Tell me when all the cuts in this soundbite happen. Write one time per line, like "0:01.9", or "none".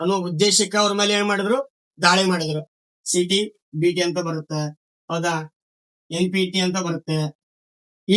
0:02.6